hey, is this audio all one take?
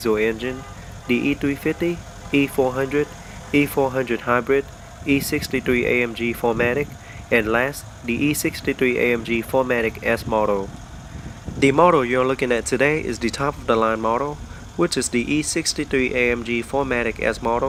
yes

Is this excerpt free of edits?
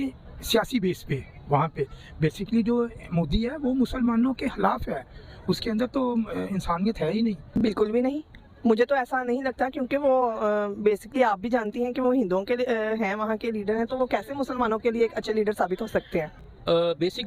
no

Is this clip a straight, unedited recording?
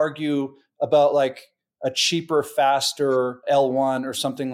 no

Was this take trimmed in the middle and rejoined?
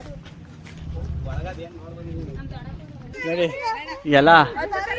yes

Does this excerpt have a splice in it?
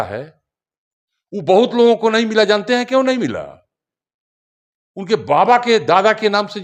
no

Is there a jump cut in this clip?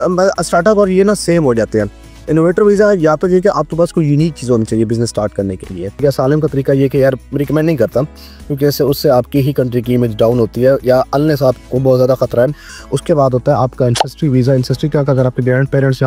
yes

